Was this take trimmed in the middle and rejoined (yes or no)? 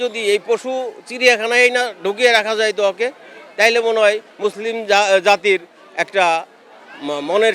no